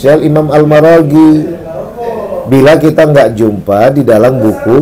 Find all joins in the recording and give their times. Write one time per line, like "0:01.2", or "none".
none